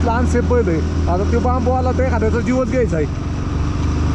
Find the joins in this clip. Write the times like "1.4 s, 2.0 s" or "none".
none